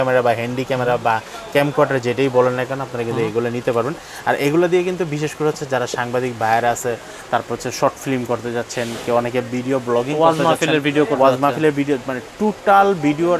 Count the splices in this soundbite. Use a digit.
0